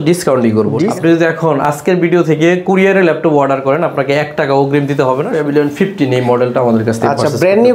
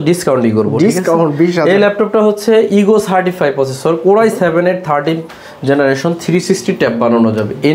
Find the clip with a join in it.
first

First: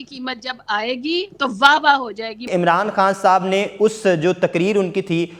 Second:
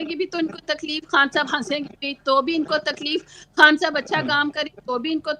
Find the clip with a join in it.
first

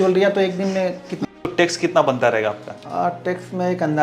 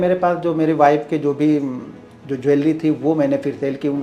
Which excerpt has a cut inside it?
first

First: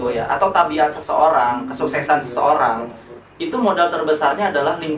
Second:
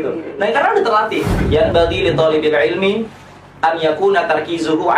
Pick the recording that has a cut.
second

